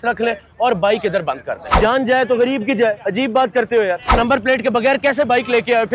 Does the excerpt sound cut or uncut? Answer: cut